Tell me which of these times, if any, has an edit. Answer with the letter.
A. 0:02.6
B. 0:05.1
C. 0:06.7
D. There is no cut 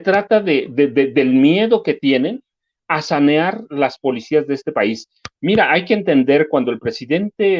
D